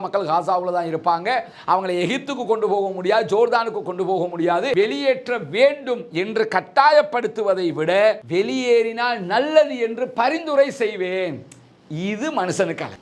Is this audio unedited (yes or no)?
no